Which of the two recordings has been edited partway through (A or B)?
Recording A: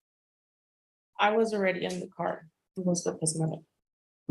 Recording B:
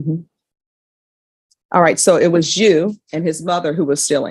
A